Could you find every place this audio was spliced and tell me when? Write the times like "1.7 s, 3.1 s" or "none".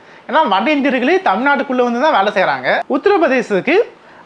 2.8 s